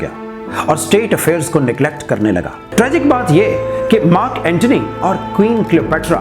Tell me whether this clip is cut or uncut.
cut